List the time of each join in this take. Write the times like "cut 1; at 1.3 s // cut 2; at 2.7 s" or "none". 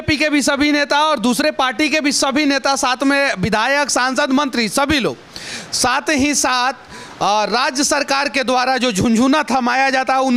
none